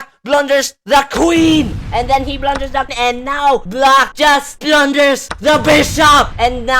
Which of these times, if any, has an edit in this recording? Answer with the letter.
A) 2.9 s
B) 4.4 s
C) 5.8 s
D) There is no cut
A